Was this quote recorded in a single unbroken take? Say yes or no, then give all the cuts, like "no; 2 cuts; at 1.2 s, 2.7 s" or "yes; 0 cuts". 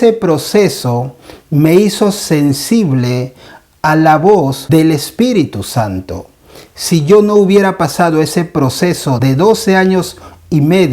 no; 1 cut; at 4.6 s